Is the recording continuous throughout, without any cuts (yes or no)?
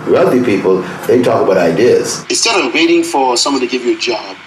no